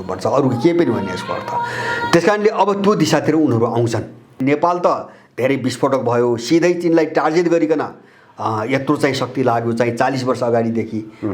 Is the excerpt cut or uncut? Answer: cut